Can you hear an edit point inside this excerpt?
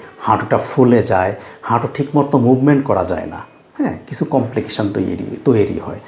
no; 0 cuts

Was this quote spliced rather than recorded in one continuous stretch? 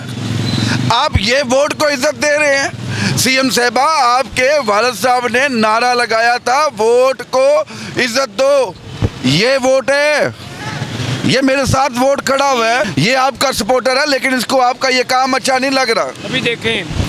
yes; 1 cut; at 12.9 s

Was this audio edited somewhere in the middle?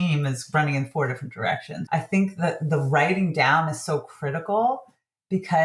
yes; 1 cut; at 1.7 s

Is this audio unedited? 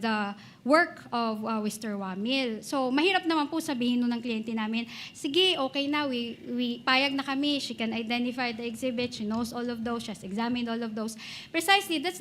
yes; 0 cuts

